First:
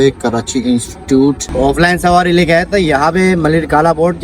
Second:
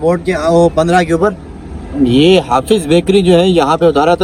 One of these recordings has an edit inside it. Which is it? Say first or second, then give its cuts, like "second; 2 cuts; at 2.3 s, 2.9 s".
first; 1 cut; at 1.4 s